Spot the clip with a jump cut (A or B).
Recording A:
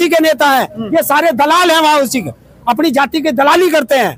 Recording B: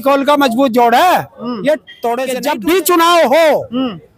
B